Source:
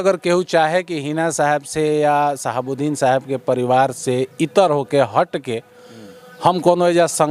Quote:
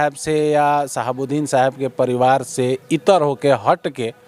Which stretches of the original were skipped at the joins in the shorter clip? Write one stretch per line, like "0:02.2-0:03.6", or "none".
none